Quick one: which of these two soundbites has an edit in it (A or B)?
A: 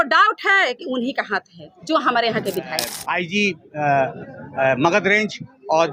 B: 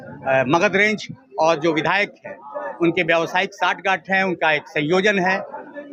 A